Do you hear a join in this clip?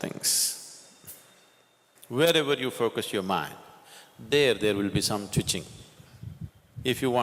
yes; 1 cut; at 1.9 s

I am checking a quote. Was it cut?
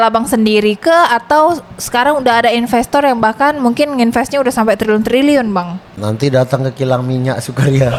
no; 0 cuts

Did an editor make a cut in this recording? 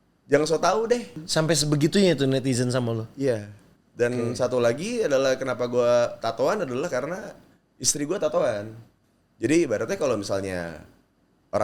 yes; 1 cut; at 1.2 s

